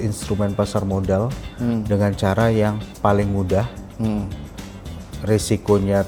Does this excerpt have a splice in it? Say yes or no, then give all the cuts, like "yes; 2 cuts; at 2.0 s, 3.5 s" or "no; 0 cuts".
no; 0 cuts